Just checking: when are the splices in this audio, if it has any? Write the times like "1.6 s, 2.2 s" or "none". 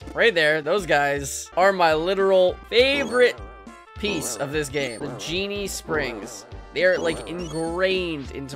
1.4 s, 2.6 s, 4.7 s